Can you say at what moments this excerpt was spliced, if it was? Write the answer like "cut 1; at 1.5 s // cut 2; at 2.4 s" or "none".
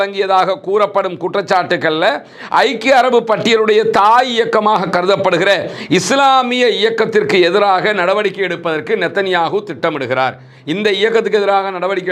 none